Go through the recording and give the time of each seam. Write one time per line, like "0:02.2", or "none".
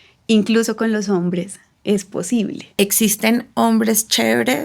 0:02.7